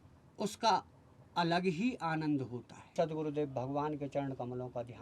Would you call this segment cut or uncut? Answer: cut